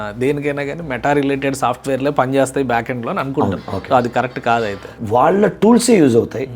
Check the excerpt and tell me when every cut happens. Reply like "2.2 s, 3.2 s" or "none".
4.9 s